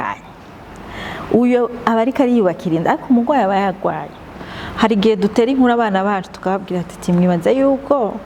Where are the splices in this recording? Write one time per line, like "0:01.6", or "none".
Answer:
0:04.4